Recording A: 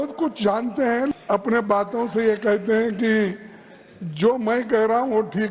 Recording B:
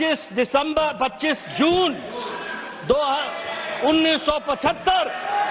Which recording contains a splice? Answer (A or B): A